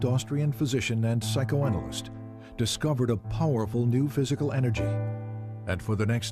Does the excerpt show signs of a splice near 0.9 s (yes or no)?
no